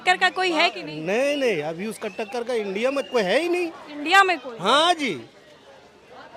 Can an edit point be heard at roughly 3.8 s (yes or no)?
no